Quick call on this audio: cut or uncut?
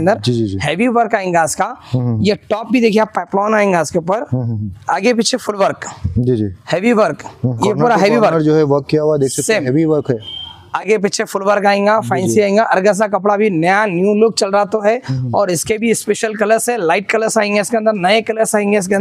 cut